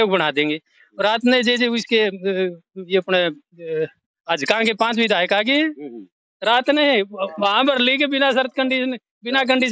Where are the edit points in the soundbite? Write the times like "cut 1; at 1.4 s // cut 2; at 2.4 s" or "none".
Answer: none